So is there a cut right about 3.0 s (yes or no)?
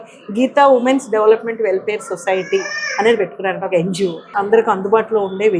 no